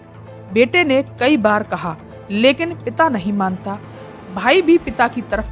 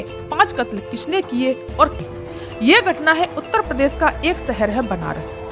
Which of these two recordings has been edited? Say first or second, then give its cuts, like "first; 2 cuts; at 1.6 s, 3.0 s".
second; 1 cut; at 2.0 s